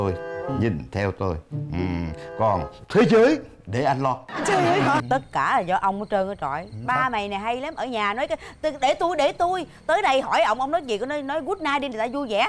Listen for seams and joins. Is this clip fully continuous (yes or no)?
no